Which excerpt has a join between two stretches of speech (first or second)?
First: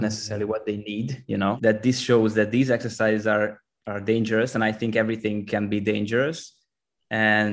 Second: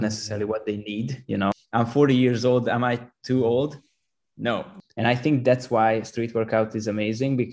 second